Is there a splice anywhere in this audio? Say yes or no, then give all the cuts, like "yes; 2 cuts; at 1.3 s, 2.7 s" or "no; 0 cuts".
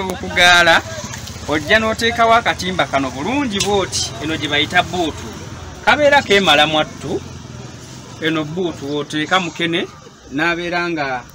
no; 0 cuts